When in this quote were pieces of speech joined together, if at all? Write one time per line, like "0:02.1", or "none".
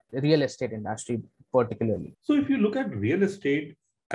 0:02.1